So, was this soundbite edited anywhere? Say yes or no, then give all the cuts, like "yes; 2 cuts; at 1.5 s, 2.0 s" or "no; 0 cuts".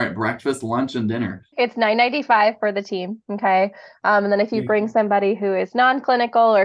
yes; 1 cut; at 1.4 s